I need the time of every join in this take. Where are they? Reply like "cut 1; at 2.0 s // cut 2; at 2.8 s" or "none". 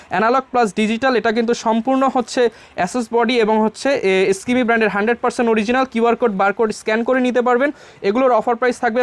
none